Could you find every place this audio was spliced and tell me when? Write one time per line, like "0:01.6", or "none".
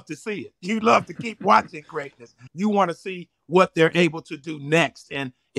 0:02.4